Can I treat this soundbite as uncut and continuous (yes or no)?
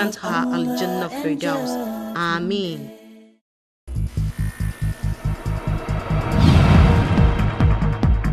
no